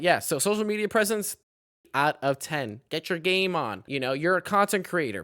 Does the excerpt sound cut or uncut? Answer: cut